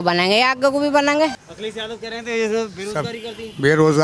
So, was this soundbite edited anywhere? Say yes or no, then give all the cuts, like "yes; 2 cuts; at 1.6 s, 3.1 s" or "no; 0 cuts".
yes; 1 cut; at 1.4 s